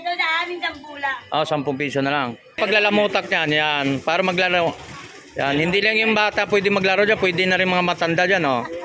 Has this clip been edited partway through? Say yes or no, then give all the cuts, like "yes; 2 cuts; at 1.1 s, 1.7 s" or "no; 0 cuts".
yes; 1 cut; at 2.6 s